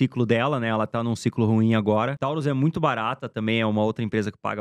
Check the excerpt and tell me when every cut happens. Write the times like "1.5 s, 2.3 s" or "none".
2.2 s